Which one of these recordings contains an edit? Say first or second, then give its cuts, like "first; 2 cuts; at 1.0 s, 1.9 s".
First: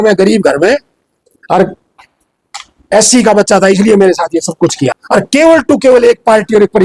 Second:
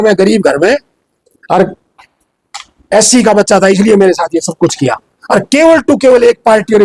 first; 1 cut; at 5.0 s